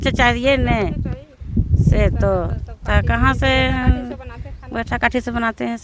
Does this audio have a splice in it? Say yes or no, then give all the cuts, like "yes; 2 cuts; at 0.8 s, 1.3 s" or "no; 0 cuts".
no; 0 cuts